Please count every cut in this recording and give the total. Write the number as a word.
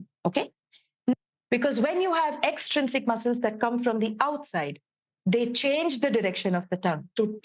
one